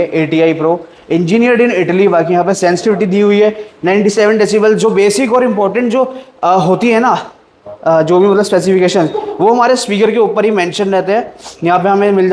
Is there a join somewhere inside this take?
no; 0 cuts

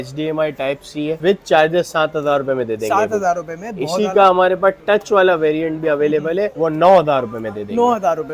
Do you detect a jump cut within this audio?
no; 0 cuts

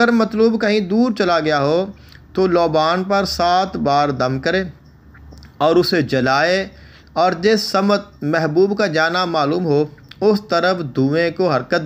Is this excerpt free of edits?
yes; 0 cuts

